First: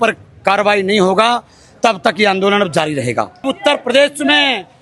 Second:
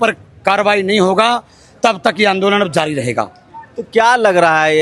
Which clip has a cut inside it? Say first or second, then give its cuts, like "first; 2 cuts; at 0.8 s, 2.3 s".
first; 1 cut; at 3.4 s